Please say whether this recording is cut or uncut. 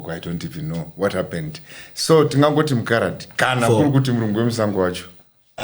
uncut